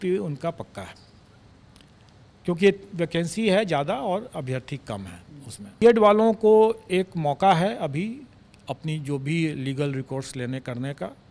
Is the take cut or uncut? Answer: cut